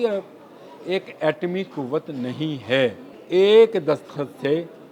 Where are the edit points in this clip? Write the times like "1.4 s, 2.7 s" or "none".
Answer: 3.2 s